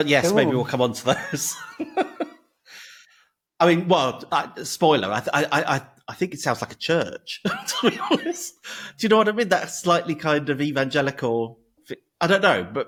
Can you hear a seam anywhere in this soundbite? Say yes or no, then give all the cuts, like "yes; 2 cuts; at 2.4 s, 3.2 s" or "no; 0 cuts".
no; 0 cuts